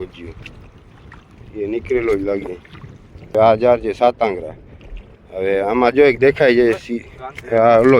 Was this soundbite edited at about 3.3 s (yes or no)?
yes